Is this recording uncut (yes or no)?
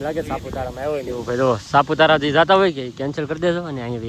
yes